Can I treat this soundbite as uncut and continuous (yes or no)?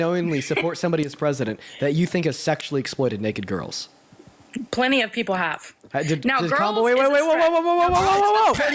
yes